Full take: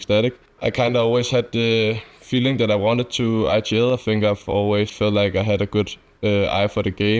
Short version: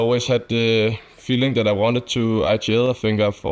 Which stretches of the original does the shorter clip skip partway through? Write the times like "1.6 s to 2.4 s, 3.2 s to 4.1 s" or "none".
none